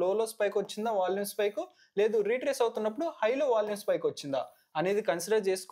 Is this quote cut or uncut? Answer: uncut